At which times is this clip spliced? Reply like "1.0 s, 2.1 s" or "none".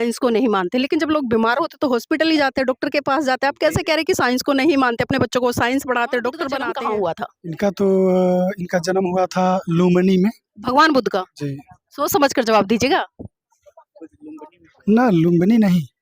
6.6 s

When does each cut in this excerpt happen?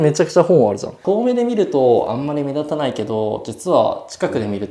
1.0 s

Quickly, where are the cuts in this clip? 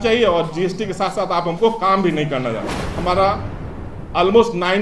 2.8 s

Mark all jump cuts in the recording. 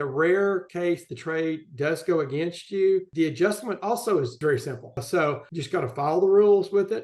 5.0 s

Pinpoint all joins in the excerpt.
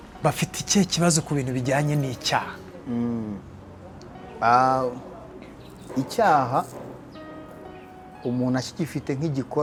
none

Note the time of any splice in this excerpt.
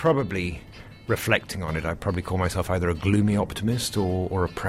none

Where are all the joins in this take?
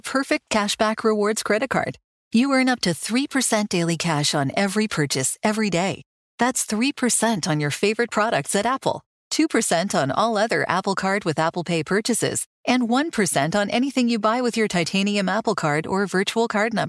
none

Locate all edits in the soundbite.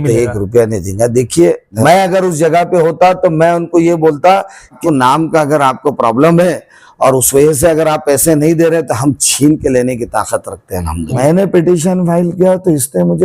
1.8 s, 4.7 s, 11.2 s

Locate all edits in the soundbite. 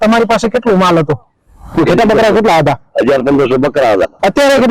none

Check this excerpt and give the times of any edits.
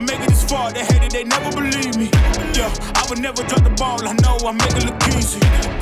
none

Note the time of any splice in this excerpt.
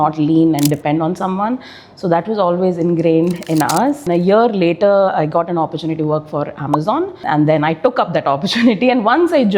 4.0 s

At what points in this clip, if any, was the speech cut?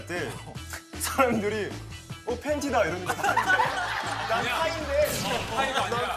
none

